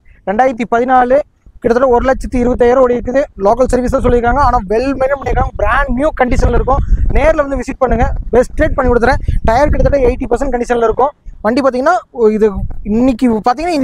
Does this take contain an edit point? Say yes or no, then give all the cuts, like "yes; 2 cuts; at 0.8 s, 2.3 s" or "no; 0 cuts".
no; 0 cuts